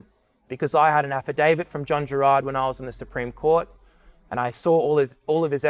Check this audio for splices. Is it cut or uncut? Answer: uncut